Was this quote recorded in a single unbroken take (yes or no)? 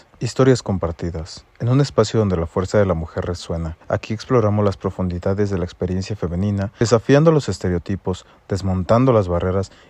no